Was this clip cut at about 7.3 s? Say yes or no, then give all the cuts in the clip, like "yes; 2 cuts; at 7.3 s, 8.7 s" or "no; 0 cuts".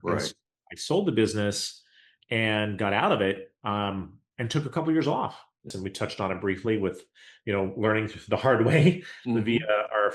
no; 1 cut; at 5.8 s